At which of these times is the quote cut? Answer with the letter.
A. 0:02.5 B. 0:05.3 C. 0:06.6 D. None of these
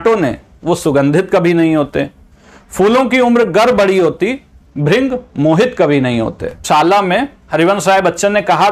C